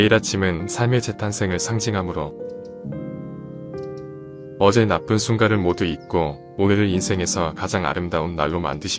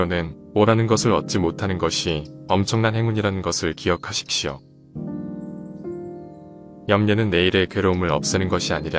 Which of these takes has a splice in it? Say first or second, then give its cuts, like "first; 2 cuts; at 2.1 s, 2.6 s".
first; 2 cuts; at 2.8 s, 4.6 s